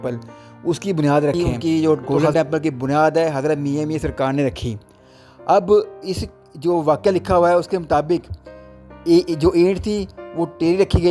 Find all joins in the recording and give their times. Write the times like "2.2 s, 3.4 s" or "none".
1.3 s